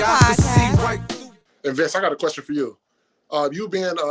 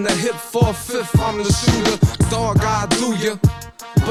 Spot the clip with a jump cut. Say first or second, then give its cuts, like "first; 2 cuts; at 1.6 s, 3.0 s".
first; 1 cut; at 1.0 s